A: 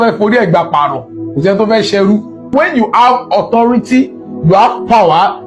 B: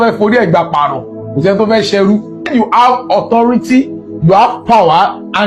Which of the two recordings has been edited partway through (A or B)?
B